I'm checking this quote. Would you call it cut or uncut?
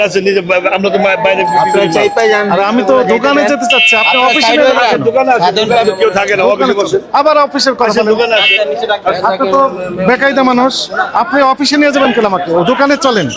uncut